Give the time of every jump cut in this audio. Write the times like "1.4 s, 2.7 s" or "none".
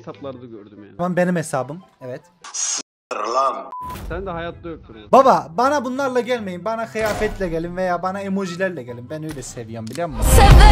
4.9 s